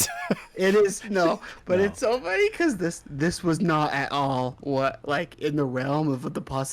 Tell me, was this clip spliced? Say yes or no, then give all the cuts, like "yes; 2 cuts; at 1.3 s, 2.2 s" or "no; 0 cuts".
yes; 1 cut; at 1.5 s